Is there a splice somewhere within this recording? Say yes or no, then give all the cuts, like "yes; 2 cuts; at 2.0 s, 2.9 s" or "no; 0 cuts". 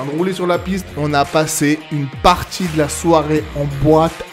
yes; 1 cut; at 0.9 s